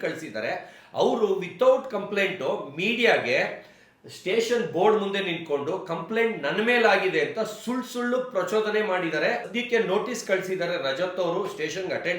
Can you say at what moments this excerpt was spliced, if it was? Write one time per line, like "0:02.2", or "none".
0:09.5